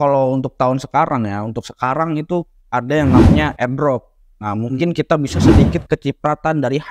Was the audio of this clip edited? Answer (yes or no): no